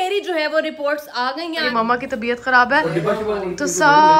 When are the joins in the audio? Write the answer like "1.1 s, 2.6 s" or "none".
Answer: 1.7 s